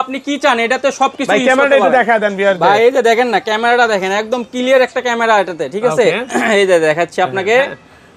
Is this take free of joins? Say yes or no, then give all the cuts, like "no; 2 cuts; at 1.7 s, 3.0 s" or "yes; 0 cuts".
yes; 0 cuts